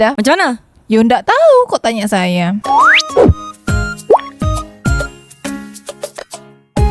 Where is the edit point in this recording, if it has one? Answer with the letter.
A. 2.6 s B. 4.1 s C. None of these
A